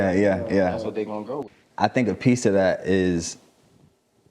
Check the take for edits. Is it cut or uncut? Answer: cut